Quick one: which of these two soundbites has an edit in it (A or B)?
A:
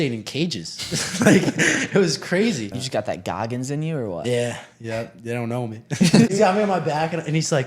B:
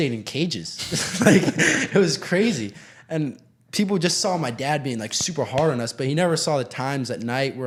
A